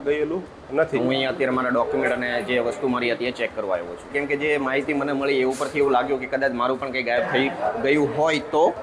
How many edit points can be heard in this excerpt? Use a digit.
2